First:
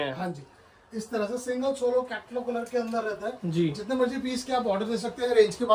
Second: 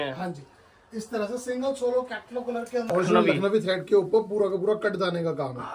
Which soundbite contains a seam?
second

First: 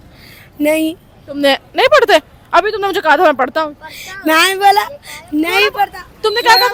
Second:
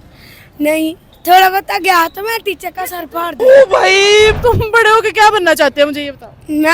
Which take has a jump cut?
second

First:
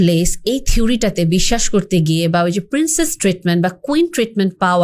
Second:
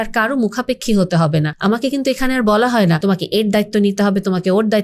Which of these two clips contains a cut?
second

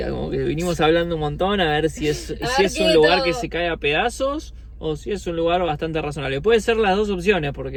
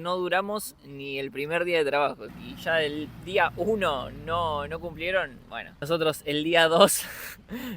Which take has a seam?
second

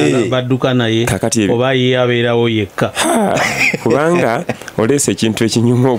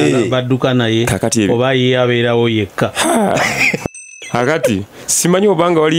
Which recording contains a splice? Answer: second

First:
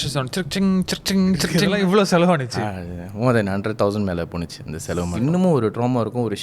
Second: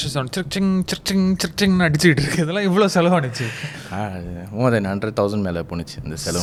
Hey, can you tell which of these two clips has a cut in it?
first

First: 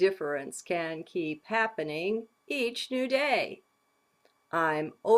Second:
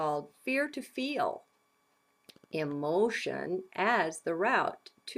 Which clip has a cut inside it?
first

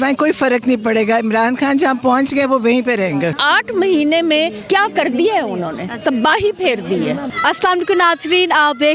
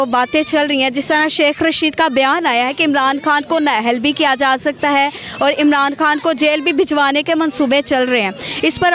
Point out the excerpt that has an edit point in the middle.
first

